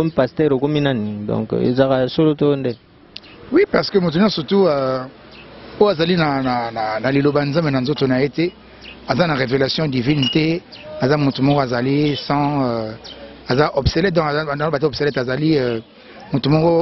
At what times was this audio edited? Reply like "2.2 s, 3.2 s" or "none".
none